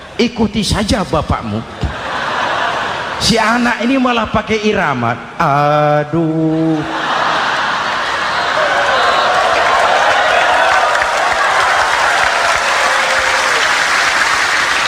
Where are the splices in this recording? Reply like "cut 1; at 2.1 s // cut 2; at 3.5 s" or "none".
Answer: none